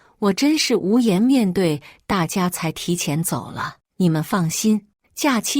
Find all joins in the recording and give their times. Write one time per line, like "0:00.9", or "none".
none